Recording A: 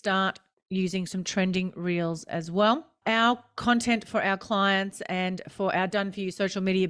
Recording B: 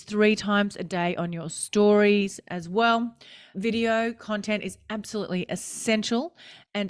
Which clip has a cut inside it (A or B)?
A